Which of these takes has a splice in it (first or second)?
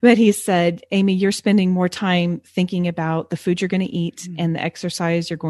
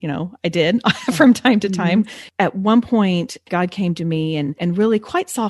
second